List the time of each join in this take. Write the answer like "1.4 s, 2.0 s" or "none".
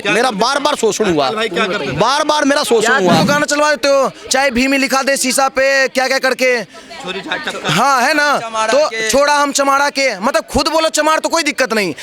3.2 s